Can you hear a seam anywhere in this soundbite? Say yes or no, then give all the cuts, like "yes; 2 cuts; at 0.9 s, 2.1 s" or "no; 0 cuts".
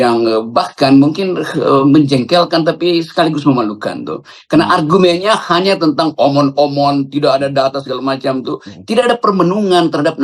no; 0 cuts